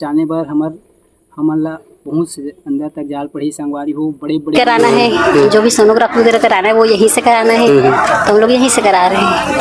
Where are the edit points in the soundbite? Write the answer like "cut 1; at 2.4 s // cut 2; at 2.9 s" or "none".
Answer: cut 1; at 4.5 s